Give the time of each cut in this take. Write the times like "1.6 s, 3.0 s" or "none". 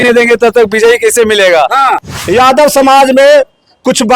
2.0 s